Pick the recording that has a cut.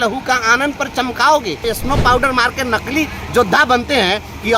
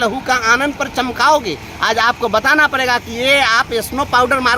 first; 1 cut; at 1.6 s

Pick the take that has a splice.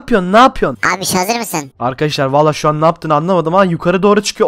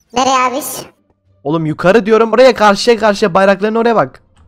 second; 1 cut; at 2.3 s

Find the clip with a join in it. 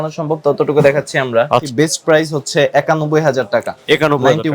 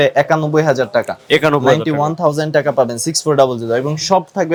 first; 1 cut; at 1.7 s

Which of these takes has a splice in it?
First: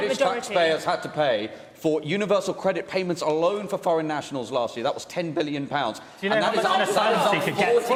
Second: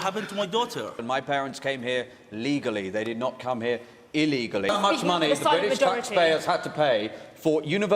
second; 2 cuts; at 1.0 s, 4.7 s

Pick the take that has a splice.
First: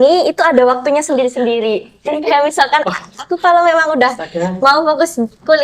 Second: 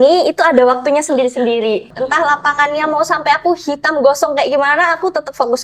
second; 1 cut; at 1.9 s

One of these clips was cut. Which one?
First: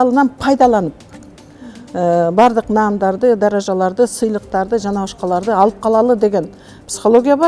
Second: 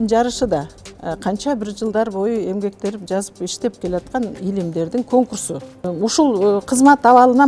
second; 1 cut; at 5.9 s

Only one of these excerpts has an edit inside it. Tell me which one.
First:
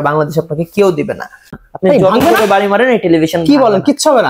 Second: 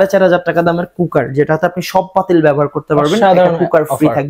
first; 1 cut; at 1.6 s

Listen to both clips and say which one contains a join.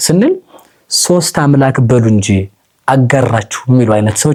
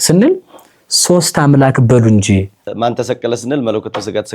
second; 1 cut; at 2.6 s

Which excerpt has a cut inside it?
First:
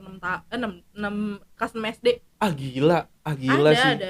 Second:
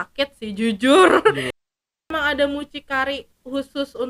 second; 1 cut; at 2.1 s

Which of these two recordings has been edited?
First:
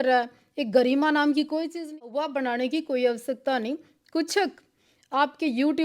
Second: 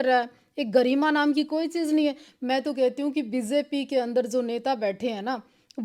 first; 1 cut; at 1.9 s

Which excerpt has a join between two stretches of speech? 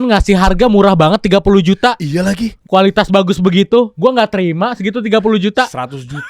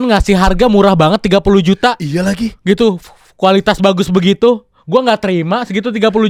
first; 2 cuts; at 2.5 s, 3.9 s

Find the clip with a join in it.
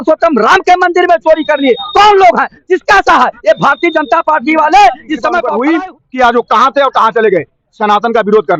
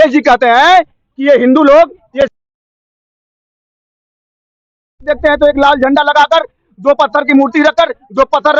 first; 1 cut; at 5.4 s

